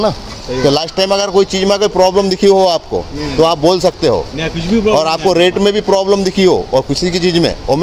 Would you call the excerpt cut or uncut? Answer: uncut